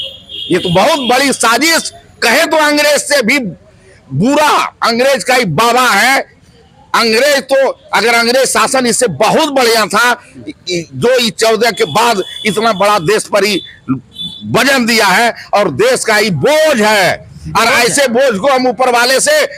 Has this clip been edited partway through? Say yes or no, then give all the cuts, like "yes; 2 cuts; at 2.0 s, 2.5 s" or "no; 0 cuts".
no; 0 cuts